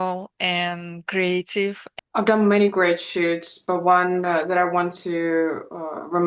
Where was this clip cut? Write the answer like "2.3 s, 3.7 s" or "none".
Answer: 1.9 s